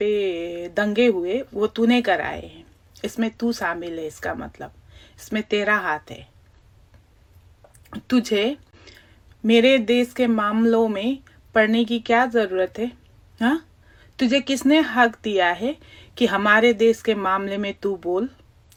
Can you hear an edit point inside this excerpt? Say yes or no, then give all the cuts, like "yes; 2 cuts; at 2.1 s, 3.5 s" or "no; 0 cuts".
no; 0 cuts